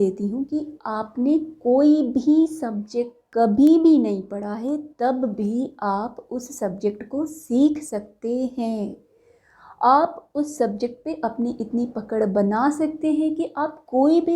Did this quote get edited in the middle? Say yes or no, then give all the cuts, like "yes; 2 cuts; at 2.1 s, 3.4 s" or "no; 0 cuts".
yes; 1 cut; at 3.2 s